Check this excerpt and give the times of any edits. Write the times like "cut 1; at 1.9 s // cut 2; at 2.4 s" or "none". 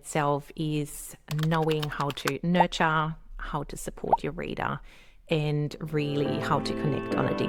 none